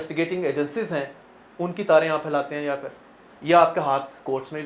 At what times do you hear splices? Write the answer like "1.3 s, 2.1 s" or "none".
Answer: none